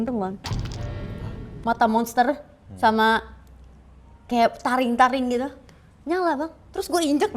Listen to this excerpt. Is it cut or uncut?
cut